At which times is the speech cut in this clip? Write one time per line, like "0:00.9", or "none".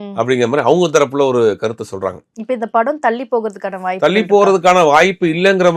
none